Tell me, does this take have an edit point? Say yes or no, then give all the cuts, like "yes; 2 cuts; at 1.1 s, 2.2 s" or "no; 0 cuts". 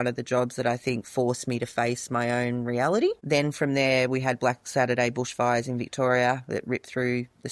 no; 0 cuts